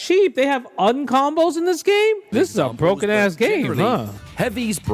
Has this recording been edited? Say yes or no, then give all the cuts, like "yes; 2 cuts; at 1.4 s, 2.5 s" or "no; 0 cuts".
yes; 2 cuts; at 2.2 s, 4.1 s